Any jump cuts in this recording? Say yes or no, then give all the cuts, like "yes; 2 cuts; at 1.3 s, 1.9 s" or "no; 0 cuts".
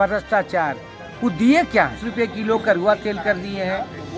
yes; 1 cut; at 2.0 s